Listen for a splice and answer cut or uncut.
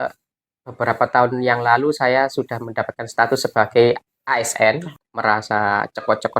cut